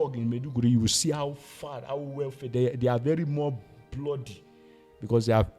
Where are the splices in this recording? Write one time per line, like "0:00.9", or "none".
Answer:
none